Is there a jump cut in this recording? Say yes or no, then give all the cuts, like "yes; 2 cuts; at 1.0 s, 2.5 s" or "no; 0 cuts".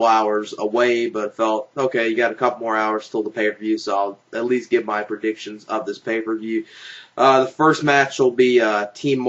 yes; 1 cut; at 7.5 s